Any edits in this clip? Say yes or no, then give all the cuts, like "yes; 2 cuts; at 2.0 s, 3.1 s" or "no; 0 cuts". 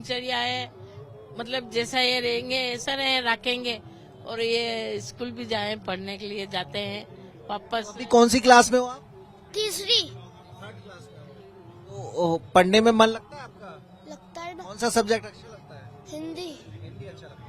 no; 0 cuts